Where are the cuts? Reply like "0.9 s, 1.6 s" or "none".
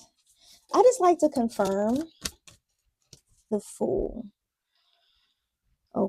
3.4 s